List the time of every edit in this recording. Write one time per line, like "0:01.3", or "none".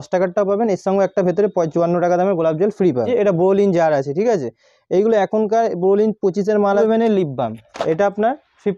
0:03.1
0:06.8